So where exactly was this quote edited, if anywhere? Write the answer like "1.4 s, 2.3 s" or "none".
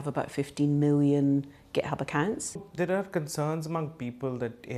2.7 s